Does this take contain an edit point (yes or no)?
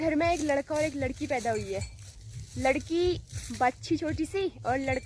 no